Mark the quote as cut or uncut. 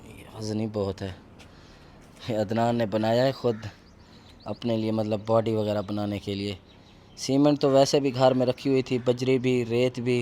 uncut